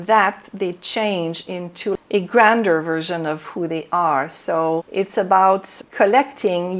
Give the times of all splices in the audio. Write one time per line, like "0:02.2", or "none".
0:02.0
0:04.9
0:05.8